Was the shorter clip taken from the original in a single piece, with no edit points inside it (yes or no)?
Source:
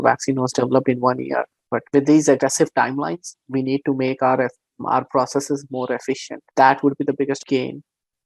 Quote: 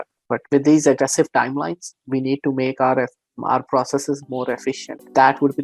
yes